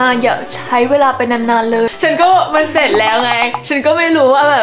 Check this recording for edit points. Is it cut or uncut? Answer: cut